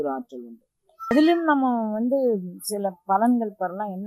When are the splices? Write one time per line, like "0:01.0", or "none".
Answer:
0:01.1